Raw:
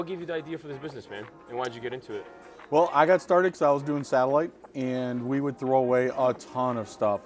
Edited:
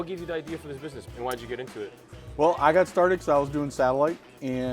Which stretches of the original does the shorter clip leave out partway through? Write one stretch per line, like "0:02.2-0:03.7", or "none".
0:01.0-0:01.4